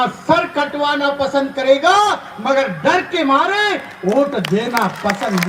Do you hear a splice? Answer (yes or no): no